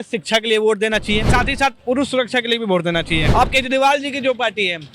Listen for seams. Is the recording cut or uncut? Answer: cut